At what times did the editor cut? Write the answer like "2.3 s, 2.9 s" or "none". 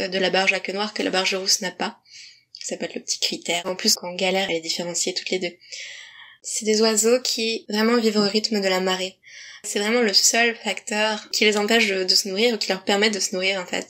3.7 s, 6.4 s, 9.6 s